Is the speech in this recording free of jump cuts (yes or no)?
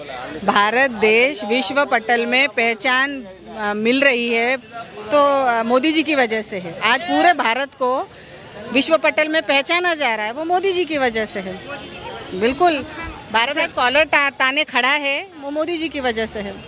yes